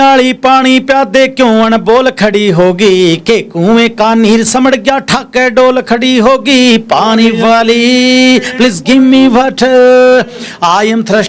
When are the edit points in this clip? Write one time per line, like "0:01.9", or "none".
none

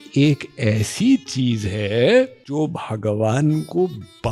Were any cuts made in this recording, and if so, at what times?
0:02.4

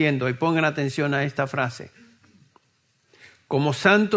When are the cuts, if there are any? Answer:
0:02.7

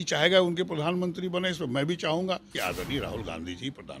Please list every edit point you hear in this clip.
0:02.5

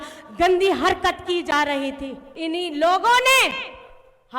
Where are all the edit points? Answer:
0:02.3

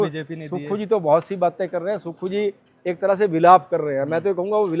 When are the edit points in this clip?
none

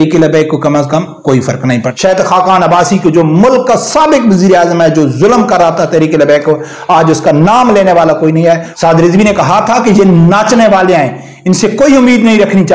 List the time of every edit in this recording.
0:01.9
0:08.7

